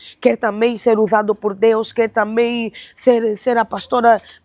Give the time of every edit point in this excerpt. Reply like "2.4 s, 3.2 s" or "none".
none